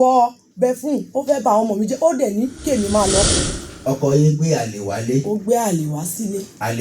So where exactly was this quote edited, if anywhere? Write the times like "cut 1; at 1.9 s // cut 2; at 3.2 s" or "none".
cut 1; at 3.3 s